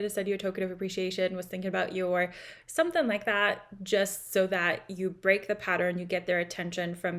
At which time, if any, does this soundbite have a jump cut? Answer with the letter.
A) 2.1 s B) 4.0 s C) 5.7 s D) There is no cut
D